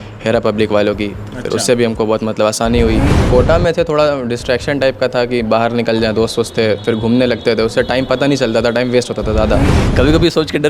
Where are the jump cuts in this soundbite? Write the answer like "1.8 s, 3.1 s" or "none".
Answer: 3.1 s, 9.8 s